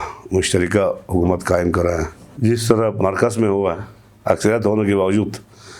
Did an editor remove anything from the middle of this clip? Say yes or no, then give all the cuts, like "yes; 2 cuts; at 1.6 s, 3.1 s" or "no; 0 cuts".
yes; 2 cuts; at 2.2 s, 3.0 s